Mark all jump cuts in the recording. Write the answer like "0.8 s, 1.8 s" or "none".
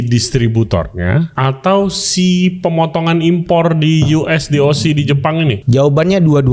1.3 s, 5.6 s